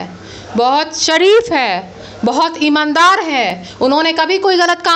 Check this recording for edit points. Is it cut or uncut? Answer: uncut